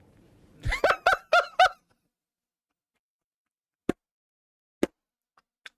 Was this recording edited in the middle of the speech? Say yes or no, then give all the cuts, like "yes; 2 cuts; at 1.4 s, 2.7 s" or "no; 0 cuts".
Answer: no; 0 cuts